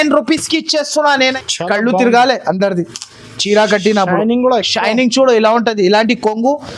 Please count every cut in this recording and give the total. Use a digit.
1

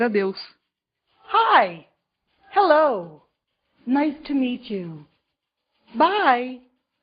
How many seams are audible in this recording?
1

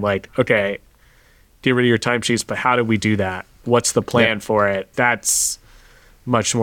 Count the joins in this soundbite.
2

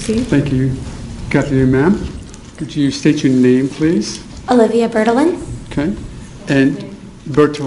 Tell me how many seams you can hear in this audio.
1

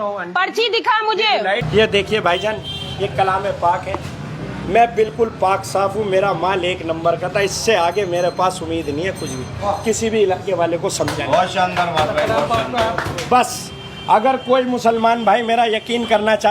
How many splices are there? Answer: 1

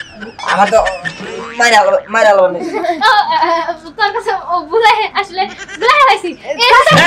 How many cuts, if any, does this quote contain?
0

